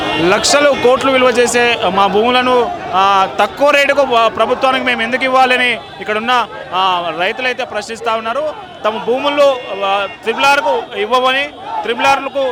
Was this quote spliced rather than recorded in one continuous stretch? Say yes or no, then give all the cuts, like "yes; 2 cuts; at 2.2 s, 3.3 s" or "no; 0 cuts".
no; 0 cuts